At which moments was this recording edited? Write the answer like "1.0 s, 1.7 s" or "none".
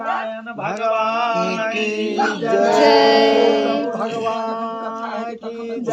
none

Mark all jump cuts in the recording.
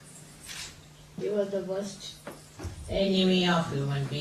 none

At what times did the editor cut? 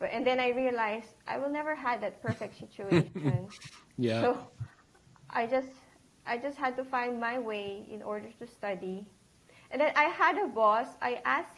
none

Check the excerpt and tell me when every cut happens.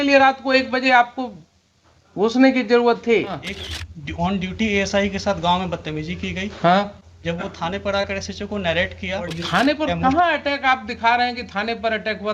3.5 s, 9.4 s

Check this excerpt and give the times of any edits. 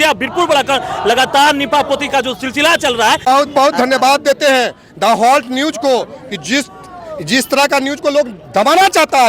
3.2 s

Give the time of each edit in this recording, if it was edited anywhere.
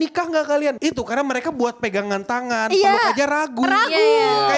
none

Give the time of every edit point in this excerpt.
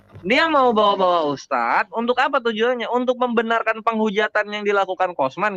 none

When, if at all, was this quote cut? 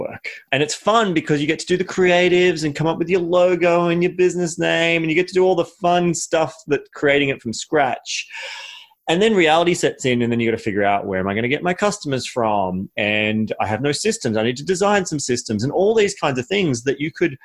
none

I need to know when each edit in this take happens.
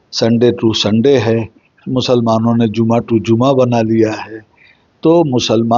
none

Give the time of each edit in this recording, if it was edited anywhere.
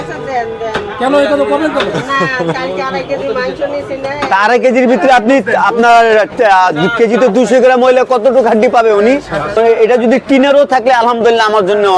9.5 s

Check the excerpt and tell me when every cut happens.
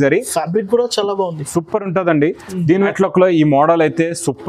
2.9 s

